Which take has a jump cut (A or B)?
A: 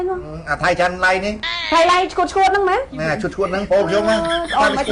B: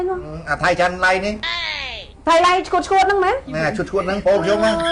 A